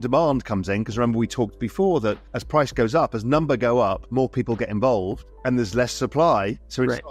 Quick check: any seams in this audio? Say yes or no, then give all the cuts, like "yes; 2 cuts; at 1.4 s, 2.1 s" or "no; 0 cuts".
no; 0 cuts